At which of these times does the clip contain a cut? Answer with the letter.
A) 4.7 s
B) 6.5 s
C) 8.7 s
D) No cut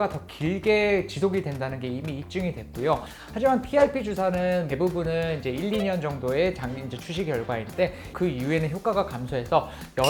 A